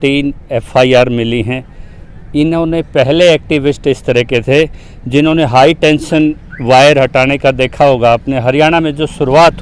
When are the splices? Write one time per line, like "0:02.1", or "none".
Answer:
none